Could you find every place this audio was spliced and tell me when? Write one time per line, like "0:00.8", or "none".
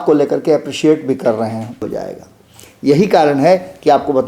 0:01.8